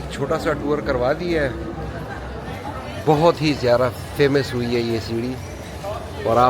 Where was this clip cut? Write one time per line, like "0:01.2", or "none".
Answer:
0:02.5